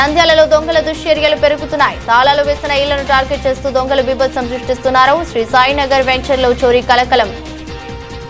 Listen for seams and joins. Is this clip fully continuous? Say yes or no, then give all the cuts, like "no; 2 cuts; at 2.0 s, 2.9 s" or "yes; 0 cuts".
yes; 0 cuts